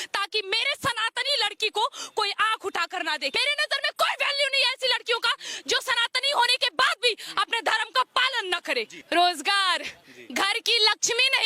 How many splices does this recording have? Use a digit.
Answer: 2